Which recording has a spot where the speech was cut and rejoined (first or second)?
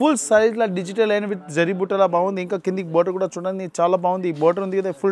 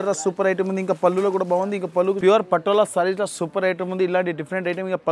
second